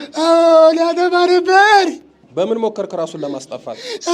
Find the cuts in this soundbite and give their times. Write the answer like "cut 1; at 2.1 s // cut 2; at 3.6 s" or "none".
cut 1; at 2.2 s